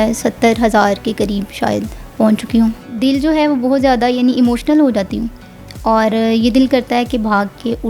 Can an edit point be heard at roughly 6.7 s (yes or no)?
no